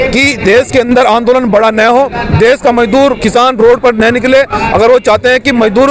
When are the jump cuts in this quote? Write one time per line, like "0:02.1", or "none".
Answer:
none